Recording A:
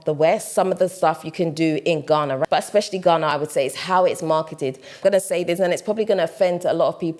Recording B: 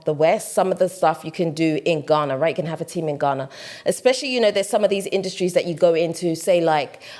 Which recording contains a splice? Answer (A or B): A